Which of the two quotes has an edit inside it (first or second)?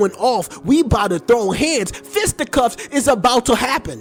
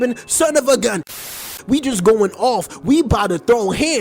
second